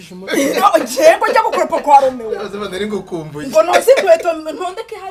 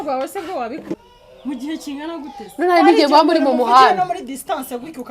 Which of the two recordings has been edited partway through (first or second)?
second